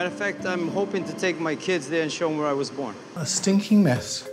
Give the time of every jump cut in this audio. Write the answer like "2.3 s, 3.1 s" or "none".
3.2 s